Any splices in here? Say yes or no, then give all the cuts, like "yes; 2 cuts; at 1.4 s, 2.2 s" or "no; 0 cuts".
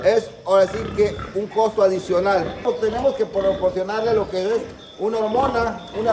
yes; 1 cut; at 2.6 s